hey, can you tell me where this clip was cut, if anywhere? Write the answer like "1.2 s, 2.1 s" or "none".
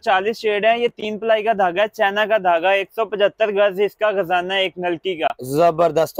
none